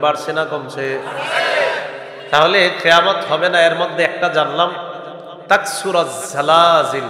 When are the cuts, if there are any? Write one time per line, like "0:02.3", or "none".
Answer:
0:02.1